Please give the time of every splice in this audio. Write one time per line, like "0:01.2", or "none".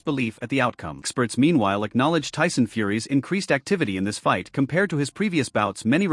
0:01.1